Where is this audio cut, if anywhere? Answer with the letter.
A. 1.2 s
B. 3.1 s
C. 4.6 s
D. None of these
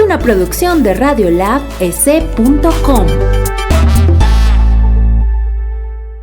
B